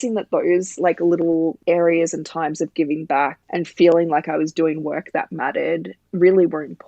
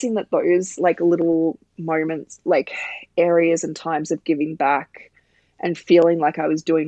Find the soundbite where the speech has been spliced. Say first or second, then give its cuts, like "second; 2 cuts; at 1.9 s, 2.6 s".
first; 3 cuts; at 1.6 s, 3.4 s, 6.0 s